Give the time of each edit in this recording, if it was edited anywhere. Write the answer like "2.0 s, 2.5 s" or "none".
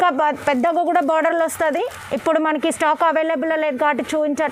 none